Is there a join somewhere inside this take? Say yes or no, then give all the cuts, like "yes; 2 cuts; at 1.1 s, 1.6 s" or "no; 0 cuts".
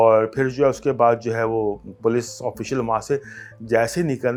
no; 0 cuts